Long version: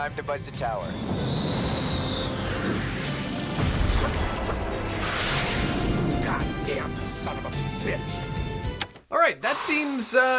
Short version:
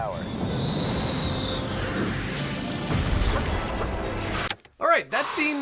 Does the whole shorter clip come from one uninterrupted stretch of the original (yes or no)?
no